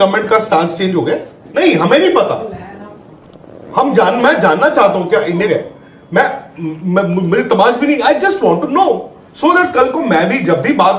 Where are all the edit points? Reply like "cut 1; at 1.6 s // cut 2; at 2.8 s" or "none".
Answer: cut 1; at 1.4 s // cut 2; at 5.5 s